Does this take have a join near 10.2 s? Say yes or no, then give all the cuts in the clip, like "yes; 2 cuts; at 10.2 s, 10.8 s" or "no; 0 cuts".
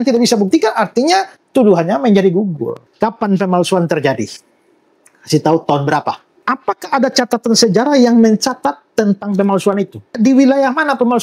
yes; 3 cuts; at 2.8 s, 6.3 s, 10.2 s